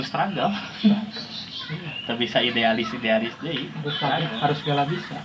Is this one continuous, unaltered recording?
yes; 0 cuts

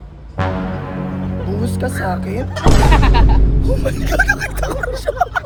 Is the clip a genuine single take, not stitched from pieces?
yes; 0 cuts

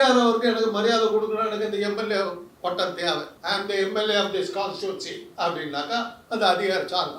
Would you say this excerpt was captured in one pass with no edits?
no; 1 cut; at 3.3 s

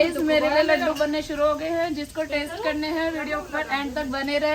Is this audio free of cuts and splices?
yes; 0 cuts

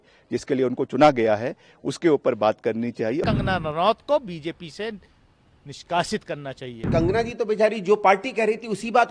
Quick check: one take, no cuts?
no; 2 cuts; at 3.2 s, 6.9 s

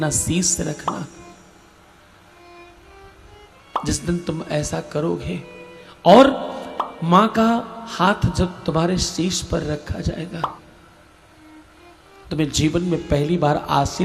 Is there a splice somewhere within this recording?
no; 0 cuts

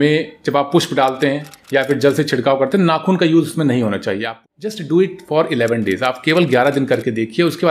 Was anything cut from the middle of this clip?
yes; 1 cut; at 4.3 s

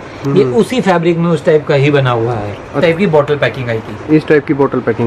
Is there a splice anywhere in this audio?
yes; 1 cut; at 2.8 s

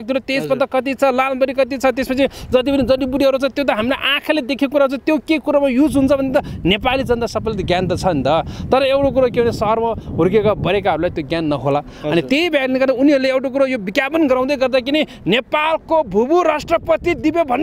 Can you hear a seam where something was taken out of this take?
no; 0 cuts

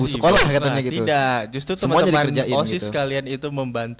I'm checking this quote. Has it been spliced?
no; 0 cuts

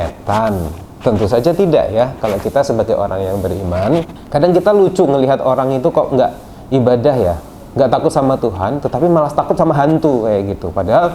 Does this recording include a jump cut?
no; 0 cuts

